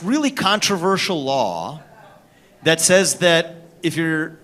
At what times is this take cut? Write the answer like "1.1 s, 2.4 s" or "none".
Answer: none